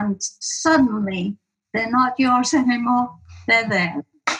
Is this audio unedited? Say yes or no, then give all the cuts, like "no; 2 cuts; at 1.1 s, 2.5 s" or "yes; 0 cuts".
yes; 0 cuts